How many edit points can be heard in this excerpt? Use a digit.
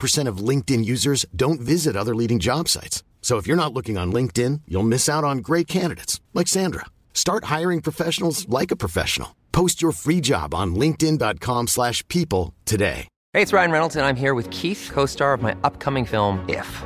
1